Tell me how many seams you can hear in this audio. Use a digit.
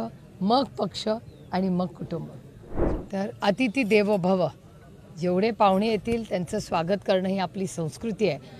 1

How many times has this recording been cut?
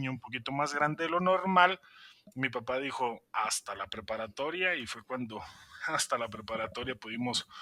0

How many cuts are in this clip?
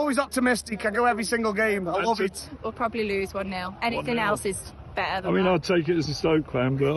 1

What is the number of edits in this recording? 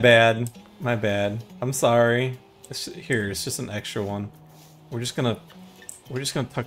1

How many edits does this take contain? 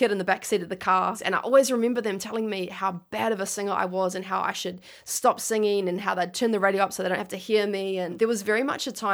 2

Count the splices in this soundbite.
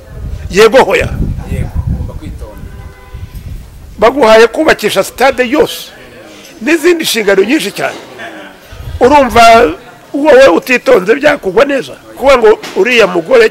1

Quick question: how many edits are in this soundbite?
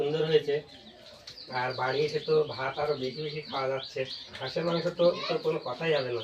2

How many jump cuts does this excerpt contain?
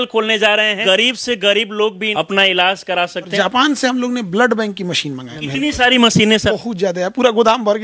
5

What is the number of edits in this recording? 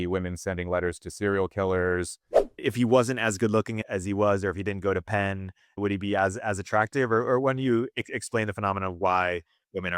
3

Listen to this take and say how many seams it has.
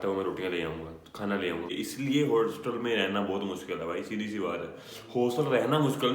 1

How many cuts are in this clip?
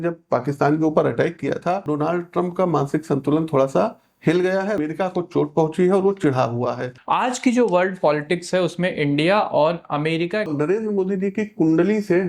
4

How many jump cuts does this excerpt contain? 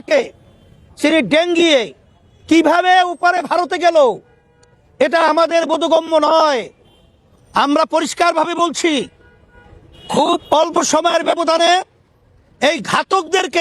0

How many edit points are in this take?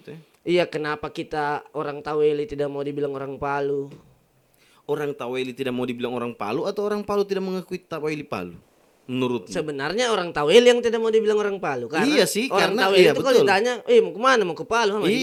0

